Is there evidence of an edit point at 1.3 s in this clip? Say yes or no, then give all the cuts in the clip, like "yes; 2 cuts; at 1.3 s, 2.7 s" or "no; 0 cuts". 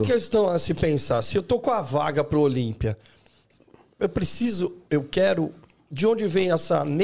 no; 0 cuts